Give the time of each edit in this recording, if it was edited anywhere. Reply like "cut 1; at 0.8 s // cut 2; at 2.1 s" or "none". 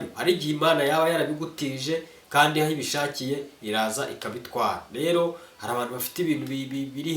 none